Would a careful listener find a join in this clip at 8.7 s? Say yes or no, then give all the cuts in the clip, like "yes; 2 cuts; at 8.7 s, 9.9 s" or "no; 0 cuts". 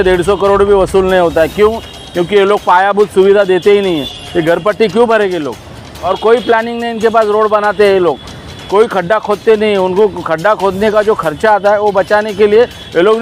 no; 1 cut; at 6.0 s